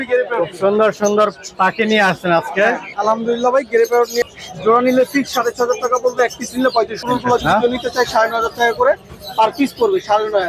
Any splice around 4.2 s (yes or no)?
yes